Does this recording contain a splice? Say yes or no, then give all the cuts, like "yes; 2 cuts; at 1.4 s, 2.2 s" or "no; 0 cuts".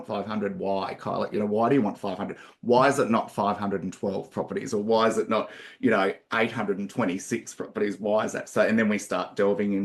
no; 0 cuts